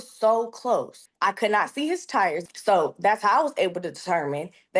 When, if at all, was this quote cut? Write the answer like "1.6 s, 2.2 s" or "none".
1.0 s, 2.5 s